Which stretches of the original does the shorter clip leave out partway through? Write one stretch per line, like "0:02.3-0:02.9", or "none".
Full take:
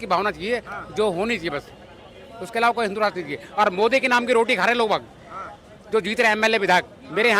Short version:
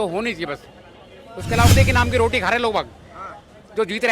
0:02.8-0:03.9